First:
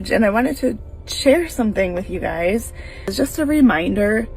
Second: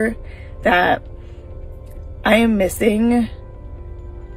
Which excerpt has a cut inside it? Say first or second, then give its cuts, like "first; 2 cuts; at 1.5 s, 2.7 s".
first; 1 cut; at 3.1 s